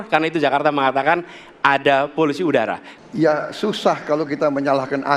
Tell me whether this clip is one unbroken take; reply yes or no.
no